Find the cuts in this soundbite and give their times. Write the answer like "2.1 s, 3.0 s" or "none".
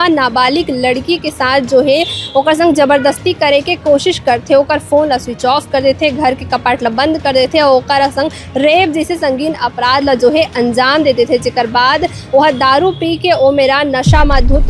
none